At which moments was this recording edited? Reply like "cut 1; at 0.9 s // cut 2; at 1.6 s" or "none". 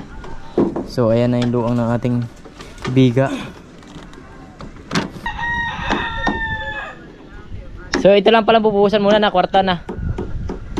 cut 1; at 5.3 s